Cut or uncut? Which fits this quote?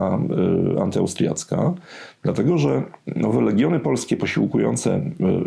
uncut